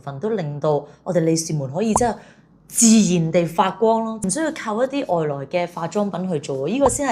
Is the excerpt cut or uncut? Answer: uncut